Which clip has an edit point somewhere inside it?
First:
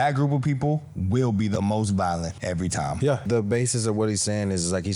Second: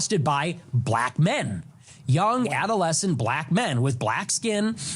first; 2 cuts; at 1.5 s, 3.2 s

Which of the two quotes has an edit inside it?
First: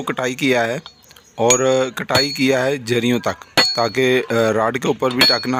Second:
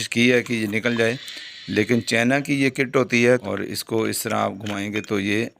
second; 1 cut; at 3.4 s

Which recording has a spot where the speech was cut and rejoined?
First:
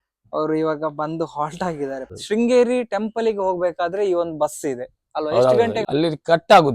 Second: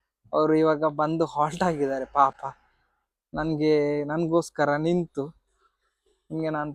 first; 2 cuts; at 2.1 s, 5.8 s

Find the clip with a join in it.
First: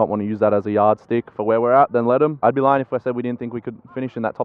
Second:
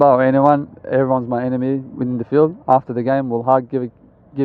first; 1 cut; at 2.4 s

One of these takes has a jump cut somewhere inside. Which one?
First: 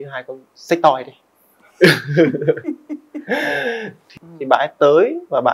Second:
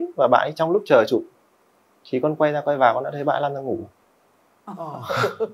first; 1 cut; at 4.0 s

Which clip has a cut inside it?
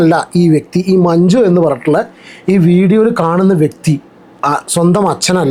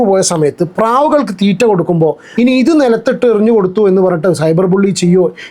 second; 1 cut; at 2.3 s

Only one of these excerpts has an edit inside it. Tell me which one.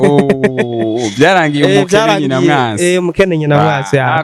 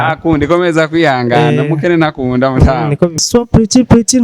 second; 1 cut; at 3.2 s

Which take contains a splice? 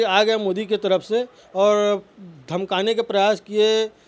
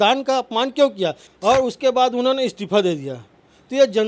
second; 1 cut; at 1.3 s

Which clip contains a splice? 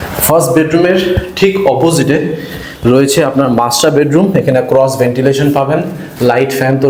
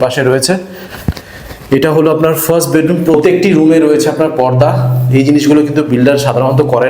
second; 1 cut; at 3.1 s

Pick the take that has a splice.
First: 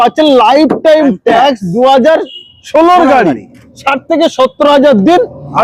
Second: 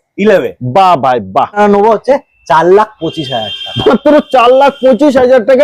second; 1 cut; at 1.6 s

